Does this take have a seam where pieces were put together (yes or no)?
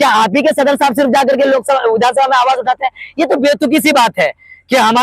no